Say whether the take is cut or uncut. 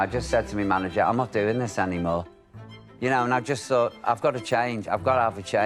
cut